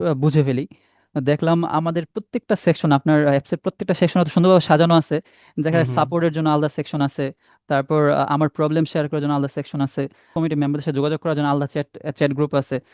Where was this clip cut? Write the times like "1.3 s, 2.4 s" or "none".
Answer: 10.3 s

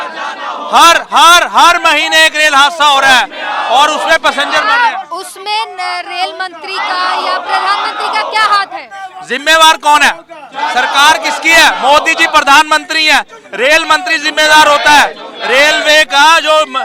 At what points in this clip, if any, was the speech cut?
none

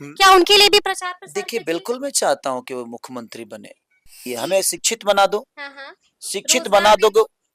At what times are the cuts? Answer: 4.3 s

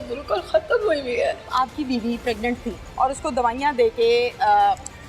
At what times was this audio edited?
1.4 s, 2.9 s

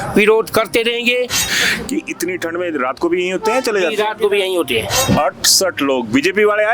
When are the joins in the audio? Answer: 1.4 s, 5.1 s

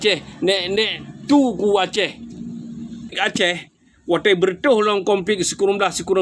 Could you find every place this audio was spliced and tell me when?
3.2 s

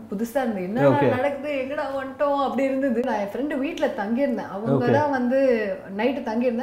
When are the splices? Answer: 3.0 s

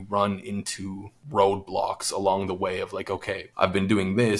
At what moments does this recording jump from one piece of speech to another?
3.4 s

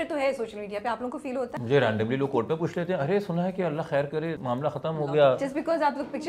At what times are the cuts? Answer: 1.5 s, 4.4 s

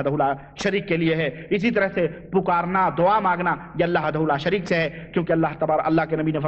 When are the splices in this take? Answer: 4.0 s

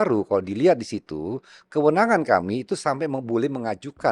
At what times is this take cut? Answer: none

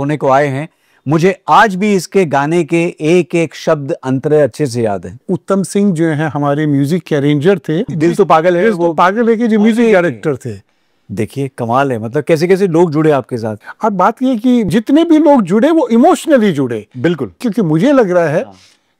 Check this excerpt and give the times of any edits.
5.2 s, 7.9 s, 13.5 s, 14.7 s, 17.4 s

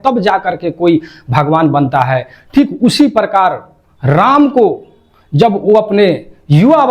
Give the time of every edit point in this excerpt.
none

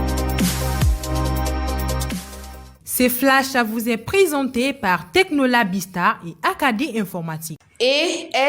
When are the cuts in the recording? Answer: 2.8 s

